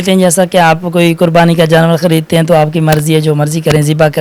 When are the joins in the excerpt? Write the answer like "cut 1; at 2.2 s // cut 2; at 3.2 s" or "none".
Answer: none